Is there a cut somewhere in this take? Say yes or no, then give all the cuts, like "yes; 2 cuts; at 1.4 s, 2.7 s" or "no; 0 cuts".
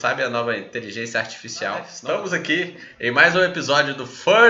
yes; 1 cut; at 1.9 s